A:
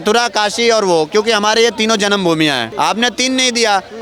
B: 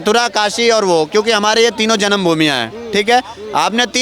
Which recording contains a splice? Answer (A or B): A